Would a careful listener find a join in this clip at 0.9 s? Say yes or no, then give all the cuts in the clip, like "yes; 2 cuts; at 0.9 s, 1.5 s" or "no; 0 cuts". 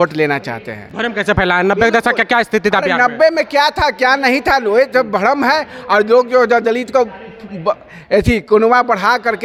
no; 0 cuts